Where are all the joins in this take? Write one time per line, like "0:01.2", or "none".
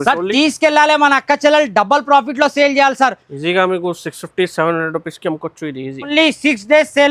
0:06.1